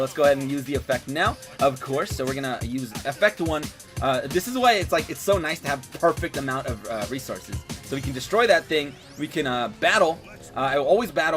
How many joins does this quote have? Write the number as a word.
one